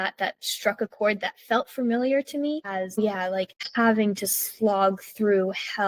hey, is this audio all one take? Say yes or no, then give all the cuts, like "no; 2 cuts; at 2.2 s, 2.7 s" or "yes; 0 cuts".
yes; 0 cuts